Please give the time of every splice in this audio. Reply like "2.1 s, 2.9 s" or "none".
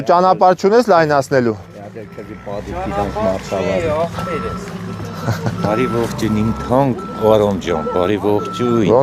none